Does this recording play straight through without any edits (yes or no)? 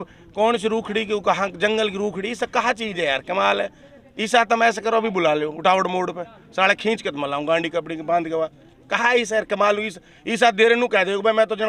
yes